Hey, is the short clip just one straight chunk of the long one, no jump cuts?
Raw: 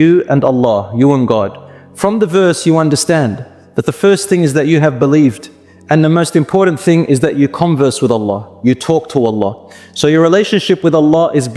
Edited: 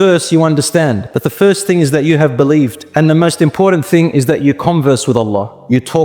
no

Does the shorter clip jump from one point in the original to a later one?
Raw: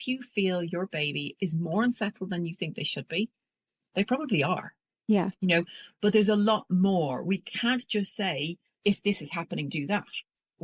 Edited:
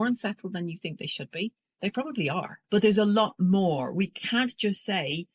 yes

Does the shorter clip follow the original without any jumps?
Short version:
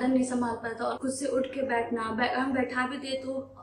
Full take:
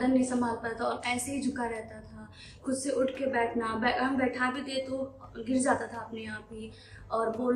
no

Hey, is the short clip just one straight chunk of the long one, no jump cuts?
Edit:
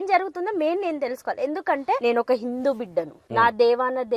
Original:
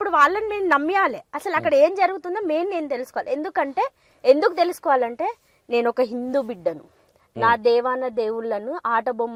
no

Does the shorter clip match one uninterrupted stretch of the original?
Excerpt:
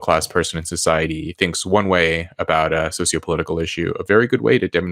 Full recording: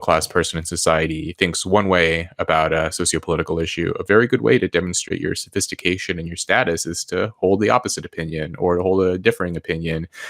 yes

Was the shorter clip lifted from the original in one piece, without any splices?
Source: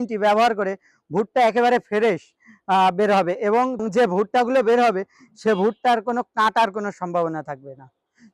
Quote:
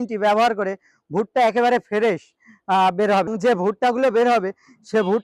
no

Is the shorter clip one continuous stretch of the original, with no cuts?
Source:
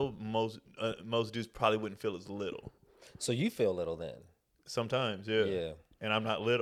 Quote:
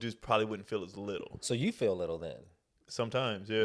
no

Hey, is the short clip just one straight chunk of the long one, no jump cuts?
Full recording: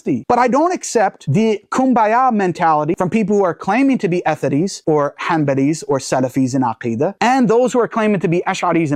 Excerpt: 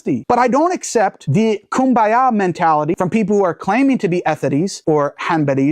yes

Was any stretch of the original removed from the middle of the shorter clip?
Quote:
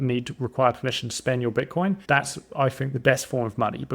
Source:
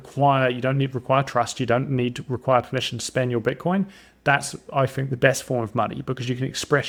yes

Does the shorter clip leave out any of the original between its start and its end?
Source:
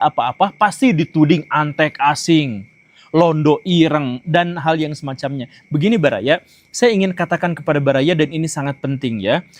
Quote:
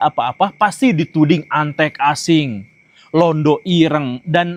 no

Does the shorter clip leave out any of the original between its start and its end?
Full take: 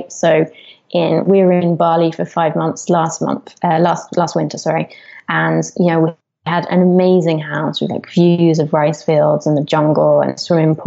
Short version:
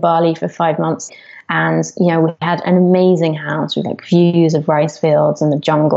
yes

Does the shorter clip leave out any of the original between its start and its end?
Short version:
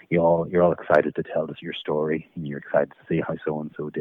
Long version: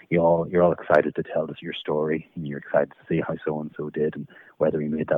no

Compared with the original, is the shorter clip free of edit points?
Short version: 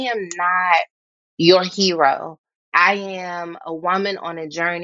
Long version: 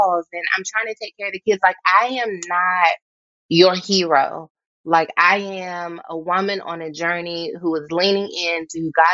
no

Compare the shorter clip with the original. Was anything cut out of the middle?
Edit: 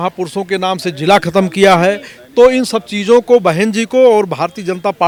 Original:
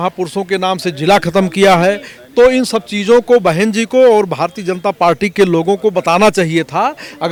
no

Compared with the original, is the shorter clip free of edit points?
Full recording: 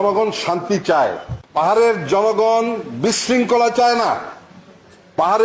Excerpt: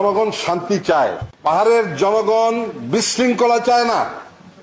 no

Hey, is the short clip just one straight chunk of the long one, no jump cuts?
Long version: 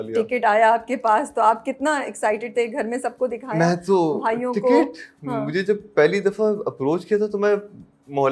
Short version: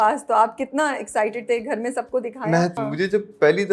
no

